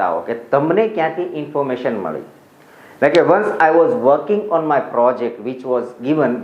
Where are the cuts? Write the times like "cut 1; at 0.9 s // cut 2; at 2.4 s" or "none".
none